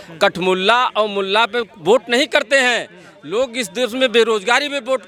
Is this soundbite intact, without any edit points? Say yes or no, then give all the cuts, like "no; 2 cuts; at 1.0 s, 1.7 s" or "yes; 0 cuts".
yes; 0 cuts